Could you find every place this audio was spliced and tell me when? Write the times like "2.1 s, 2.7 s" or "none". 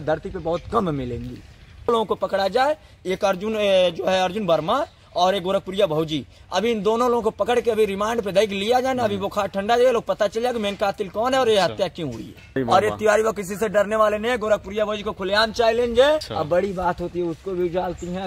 1.9 s, 12.5 s, 16.3 s